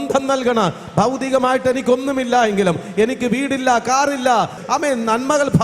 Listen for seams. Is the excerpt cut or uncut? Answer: cut